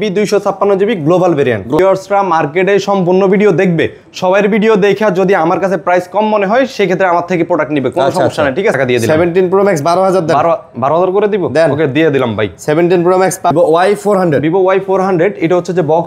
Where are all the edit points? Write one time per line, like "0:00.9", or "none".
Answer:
0:01.8
0:08.8
0:13.5